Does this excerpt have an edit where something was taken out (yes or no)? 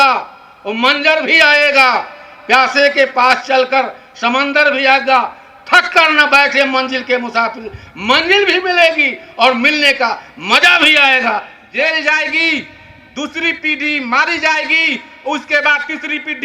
yes